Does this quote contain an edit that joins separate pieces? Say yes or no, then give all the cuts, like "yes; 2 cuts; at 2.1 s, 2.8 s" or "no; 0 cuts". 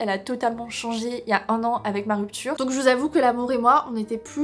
yes; 1 cut; at 2.6 s